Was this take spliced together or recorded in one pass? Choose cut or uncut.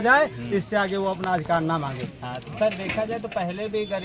uncut